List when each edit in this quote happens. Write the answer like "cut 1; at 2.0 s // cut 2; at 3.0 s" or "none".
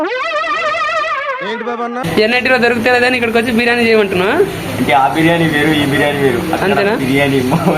cut 1; at 2.0 s